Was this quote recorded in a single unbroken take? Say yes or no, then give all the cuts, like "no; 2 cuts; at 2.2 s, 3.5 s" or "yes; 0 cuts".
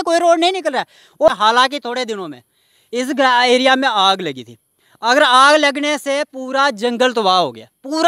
no; 1 cut; at 1.4 s